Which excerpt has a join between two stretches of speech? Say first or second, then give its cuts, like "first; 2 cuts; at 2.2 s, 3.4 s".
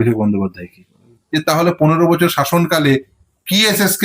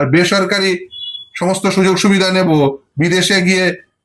first; 1 cut; at 1.2 s